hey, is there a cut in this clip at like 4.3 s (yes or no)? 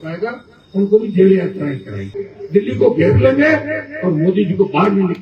no